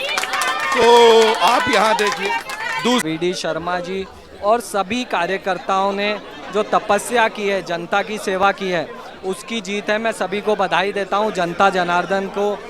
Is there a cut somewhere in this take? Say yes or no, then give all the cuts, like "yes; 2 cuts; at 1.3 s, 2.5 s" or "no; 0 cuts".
yes; 1 cut; at 3.0 s